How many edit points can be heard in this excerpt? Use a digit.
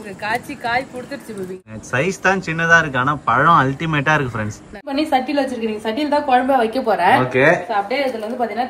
2